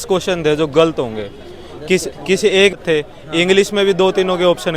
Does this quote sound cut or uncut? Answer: cut